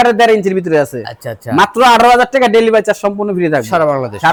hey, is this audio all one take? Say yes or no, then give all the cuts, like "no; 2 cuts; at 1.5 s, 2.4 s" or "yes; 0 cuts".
yes; 0 cuts